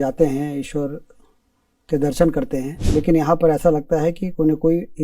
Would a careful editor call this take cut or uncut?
cut